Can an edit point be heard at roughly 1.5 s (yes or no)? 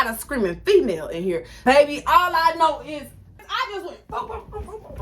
yes